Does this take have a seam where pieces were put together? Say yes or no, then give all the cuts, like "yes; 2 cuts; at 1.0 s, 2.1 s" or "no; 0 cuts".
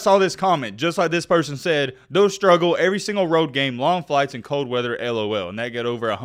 no; 0 cuts